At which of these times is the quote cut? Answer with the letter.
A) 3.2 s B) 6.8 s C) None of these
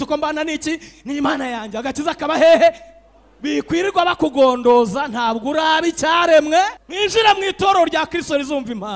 B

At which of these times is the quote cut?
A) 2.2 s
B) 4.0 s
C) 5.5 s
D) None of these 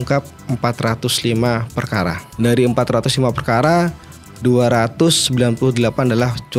A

